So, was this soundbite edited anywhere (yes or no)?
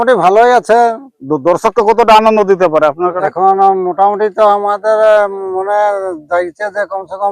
no